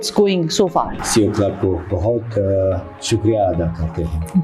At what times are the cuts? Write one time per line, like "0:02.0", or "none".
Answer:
0:01.0